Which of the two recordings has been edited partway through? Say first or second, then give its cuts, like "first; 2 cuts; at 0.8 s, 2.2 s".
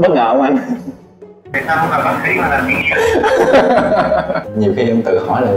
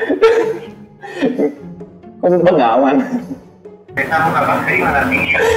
first; 1 cut; at 4.5 s